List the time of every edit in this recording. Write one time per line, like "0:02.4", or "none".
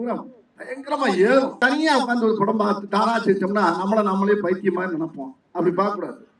0:01.5